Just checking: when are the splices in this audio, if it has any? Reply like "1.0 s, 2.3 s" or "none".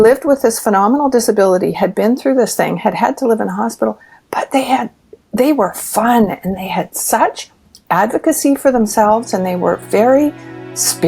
none